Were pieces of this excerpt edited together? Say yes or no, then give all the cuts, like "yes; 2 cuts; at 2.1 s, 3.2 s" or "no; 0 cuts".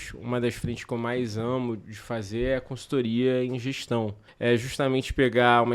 yes; 1 cut; at 4.2 s